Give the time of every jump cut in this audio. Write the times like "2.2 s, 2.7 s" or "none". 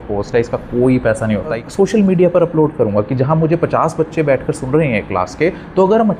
1.5 s